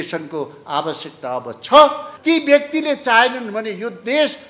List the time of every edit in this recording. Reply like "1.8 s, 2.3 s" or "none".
2.1 s